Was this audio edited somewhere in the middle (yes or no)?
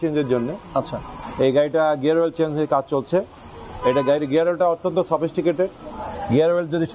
no